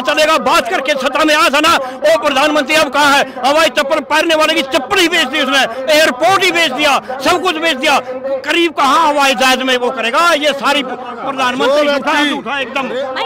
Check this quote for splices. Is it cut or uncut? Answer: uncut